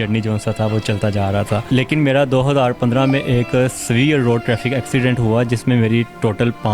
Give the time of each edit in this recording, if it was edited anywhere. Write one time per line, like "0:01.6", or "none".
0:01.6